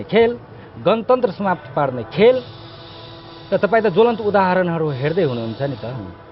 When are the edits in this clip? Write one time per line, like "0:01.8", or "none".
none

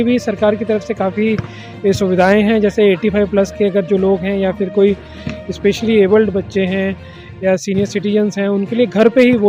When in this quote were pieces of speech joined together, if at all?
none

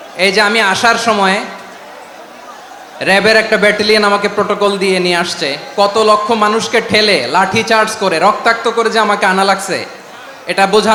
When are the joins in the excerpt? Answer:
none

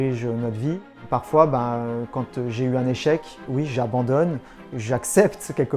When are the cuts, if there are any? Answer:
0:00.9

